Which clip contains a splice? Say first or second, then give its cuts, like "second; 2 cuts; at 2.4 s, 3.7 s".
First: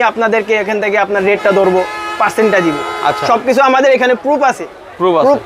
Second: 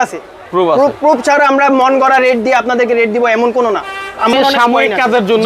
second; 1 cut; at 4.3 s